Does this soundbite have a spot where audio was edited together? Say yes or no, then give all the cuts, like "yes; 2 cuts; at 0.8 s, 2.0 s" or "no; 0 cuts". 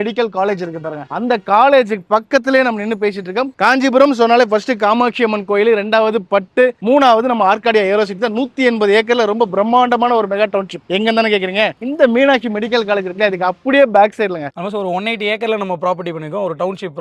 yes; 2 cuts; at 3.5 s, 14.5 s